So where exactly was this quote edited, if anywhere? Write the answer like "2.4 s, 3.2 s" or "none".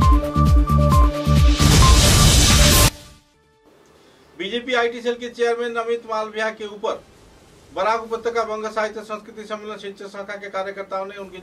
none